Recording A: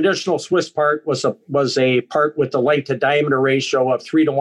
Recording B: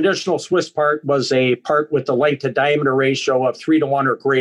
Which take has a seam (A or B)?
B